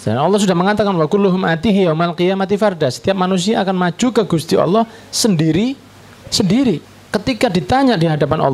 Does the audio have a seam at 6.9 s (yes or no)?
yes